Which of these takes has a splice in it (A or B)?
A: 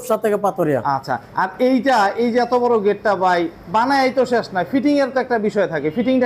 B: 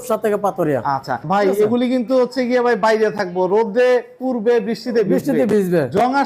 B